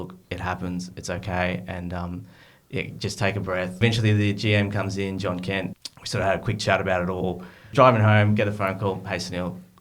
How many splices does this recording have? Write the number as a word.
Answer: three